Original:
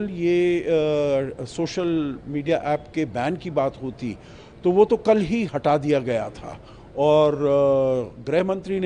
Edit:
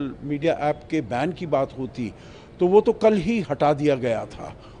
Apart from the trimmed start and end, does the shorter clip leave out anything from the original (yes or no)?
no